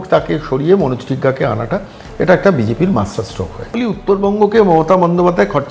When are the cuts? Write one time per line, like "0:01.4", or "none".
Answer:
0:03.7